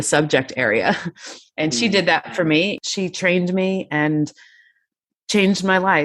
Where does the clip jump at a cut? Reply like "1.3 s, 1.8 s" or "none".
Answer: 2.8 s